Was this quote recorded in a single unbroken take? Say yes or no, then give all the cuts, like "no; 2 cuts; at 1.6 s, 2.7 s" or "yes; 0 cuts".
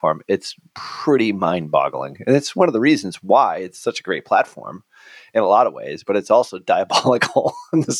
yes; 0 cuts